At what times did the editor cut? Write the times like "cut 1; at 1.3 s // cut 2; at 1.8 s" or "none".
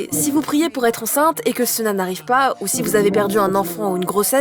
none